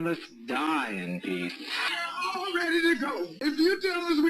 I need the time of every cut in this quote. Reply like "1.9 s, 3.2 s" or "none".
3.3 s